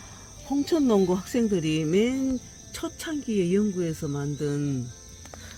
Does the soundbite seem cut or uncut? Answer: uncut